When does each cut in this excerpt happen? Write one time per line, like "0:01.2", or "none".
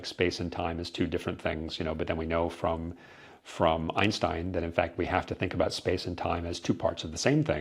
none